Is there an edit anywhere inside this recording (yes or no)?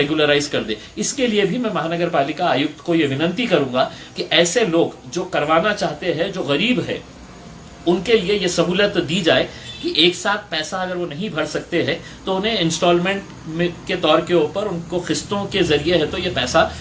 no